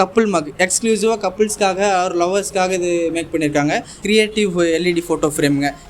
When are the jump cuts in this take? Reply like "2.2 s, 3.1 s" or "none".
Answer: 4.0 s